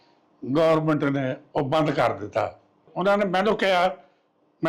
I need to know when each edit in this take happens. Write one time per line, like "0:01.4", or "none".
0:02.9